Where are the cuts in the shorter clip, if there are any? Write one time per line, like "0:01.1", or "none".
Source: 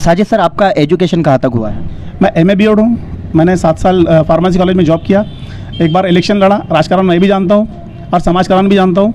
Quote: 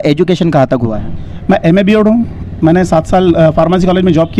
none